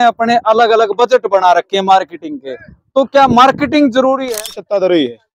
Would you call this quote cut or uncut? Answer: cut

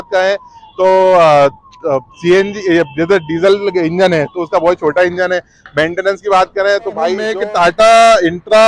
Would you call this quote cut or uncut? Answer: cut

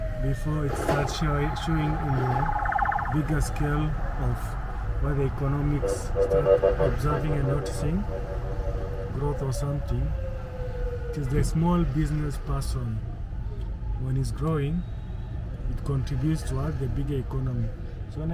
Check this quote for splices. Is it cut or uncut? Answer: uncut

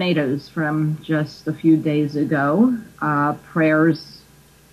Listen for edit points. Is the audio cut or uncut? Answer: cut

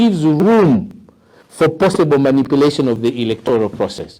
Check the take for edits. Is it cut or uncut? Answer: uncut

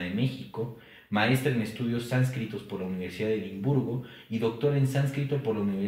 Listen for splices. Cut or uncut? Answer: uncut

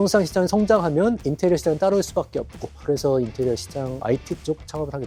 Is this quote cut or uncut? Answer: uncut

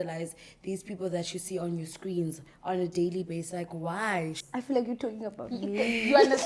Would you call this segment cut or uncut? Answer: cut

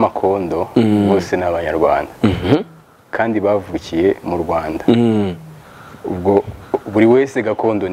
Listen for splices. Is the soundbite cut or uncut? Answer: uncut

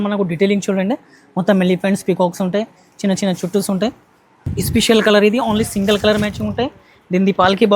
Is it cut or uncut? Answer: cut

